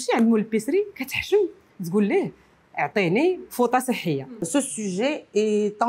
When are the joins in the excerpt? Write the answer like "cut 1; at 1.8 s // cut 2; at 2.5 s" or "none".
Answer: cut 1; at 4.4 s